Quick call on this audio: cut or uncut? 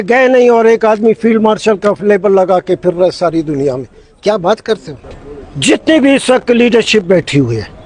cut